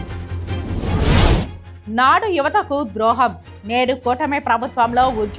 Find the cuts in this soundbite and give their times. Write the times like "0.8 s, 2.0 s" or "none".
1.6 s